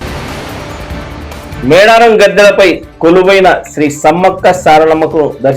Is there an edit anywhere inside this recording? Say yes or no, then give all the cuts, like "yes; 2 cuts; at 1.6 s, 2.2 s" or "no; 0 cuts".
no; 0 cuts